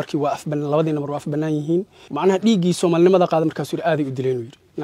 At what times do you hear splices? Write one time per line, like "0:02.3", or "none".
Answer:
0:02.0